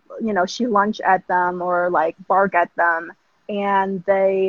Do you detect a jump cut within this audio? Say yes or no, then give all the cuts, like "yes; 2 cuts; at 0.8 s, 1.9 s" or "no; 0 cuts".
no; 0 cuts